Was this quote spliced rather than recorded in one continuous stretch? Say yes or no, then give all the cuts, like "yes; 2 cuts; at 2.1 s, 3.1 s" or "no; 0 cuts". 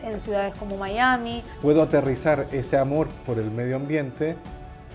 yes; 1 cut; at 1.5 s